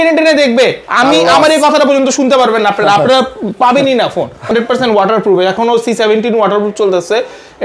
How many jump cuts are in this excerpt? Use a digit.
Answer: 1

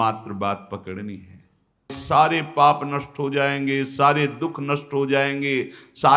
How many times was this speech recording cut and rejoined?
1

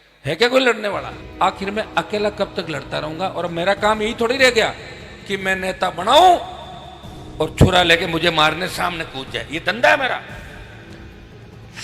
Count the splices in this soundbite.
1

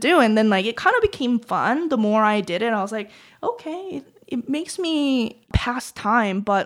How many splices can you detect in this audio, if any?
0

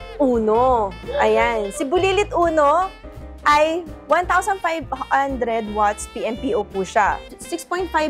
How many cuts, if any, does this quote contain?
0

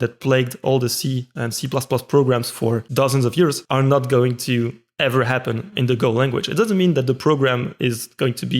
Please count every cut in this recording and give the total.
2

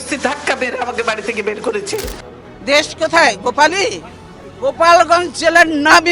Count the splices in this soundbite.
1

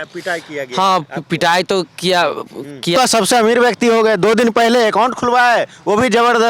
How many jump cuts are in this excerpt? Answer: 1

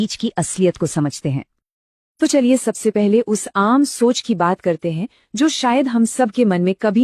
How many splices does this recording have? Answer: 0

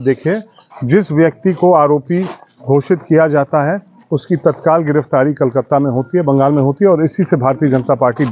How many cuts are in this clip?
0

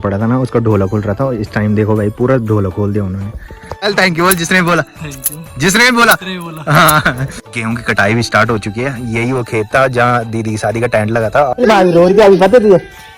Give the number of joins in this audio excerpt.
3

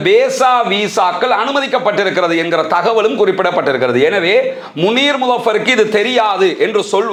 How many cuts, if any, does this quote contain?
0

